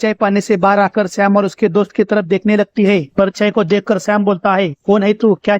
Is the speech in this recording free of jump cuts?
no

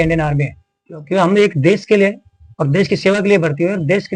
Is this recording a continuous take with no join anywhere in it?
yes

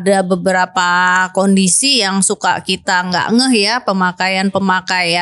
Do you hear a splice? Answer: no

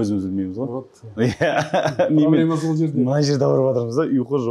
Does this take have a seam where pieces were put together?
no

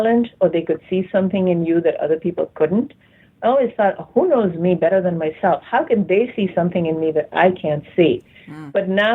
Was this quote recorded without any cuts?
yes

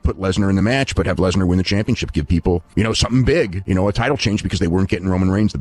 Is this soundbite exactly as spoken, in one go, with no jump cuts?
yes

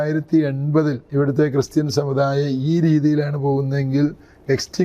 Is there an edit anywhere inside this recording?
yes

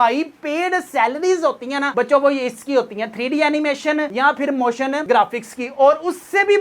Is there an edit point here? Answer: no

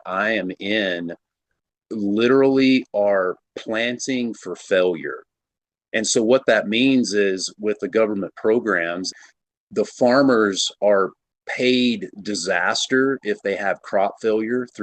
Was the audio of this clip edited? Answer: yes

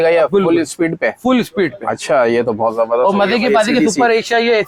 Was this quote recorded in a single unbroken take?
yes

